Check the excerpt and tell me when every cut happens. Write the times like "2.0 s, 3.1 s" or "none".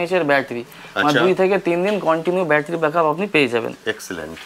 none